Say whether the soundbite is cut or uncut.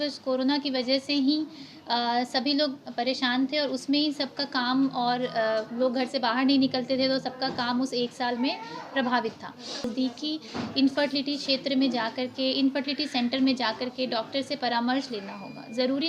cut